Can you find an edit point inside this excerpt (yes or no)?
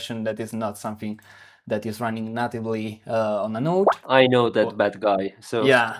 yes